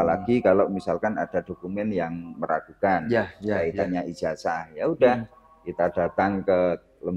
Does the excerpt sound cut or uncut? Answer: uncut